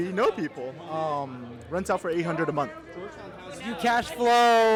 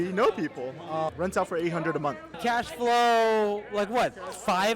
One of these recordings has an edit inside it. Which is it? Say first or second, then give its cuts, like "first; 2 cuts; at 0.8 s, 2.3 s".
second; 2 cuts; at 1.1 s, 2.3 s